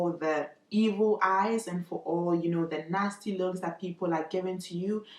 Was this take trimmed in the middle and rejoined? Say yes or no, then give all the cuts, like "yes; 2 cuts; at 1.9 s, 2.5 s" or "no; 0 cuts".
no; 0 cuts